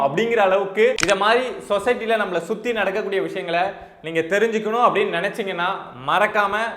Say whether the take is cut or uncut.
cut